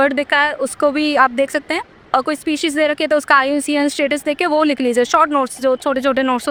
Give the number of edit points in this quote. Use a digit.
0